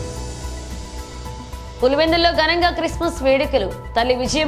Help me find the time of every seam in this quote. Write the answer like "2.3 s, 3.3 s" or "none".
1.2 s